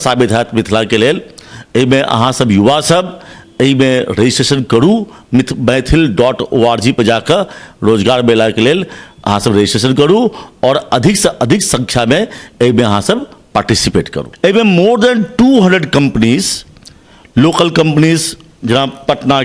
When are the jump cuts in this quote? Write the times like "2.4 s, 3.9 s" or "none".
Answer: 14.2 s